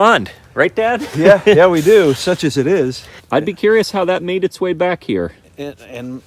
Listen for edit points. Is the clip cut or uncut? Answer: cut